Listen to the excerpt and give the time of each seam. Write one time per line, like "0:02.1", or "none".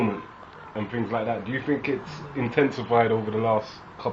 0:01.6